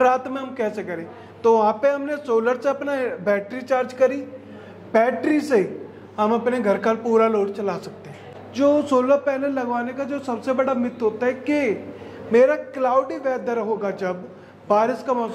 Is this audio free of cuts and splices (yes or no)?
no